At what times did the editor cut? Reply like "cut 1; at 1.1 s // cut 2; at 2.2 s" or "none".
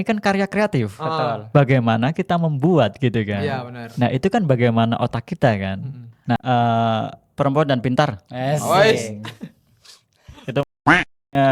cut 1; at 6.4 s